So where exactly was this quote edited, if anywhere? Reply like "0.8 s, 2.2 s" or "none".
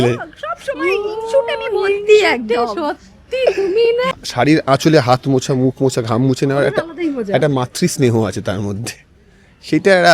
4.1 s